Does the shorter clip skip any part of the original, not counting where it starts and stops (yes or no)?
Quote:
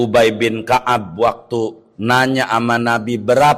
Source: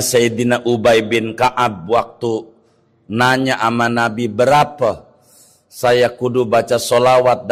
yes